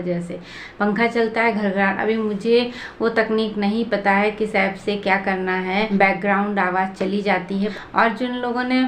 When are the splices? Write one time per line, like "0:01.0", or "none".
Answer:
0:05.9
0:07.7

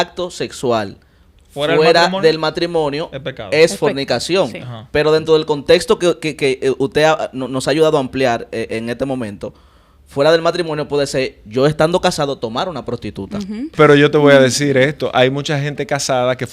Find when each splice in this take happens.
0:13.6

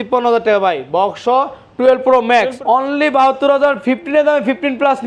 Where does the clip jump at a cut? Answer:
0:02.5

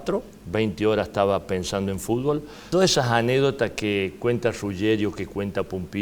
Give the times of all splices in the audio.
0:02.6

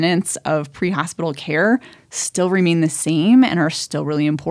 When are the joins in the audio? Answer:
none

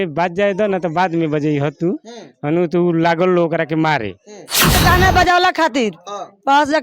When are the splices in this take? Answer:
0:04.8

